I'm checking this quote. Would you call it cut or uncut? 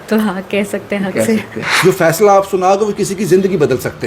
cut